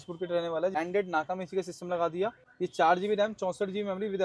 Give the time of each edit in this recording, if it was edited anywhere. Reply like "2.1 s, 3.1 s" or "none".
0.8 s, 2.4 s